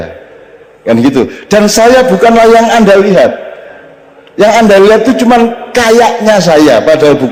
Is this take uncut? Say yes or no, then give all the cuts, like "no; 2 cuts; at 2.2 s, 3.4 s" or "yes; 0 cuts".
yes; 0 cuts